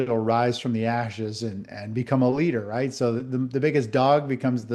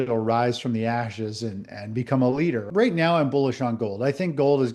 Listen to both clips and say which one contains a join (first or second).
second